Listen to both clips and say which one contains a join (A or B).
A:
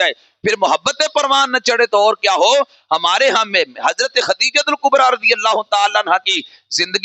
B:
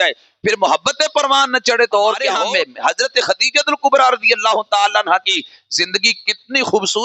B